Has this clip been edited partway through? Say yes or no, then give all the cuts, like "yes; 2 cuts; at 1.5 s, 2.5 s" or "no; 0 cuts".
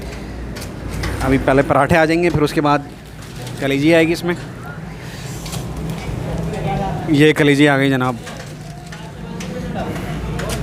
no; 0 cuts